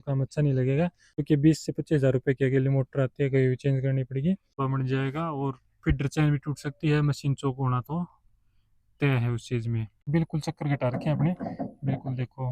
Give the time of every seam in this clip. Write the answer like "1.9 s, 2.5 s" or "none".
1.2 s, 4.5 s, 10.1 s

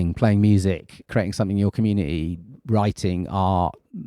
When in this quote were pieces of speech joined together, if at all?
1.1 s

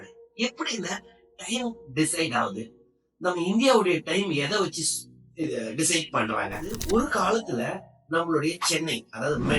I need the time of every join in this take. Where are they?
6.8 s

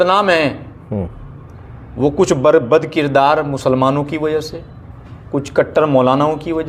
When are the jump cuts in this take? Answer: none

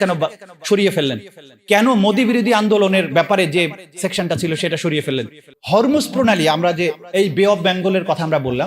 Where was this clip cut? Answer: 5.4 s

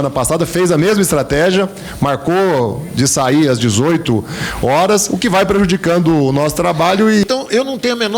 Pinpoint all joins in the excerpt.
7.2 s

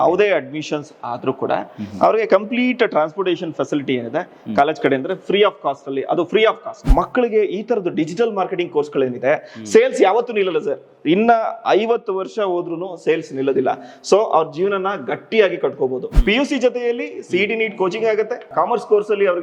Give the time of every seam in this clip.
6.8 s, 16.0 s

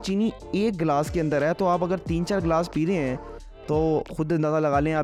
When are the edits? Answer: none

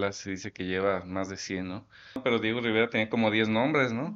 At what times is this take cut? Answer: 2.2 s

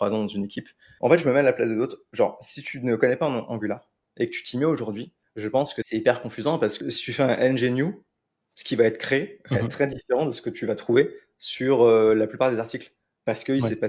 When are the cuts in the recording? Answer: 0.9 s, 5.8 s, 6.8 s

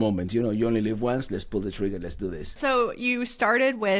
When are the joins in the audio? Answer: none

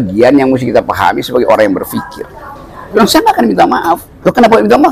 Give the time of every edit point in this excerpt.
2.9 s

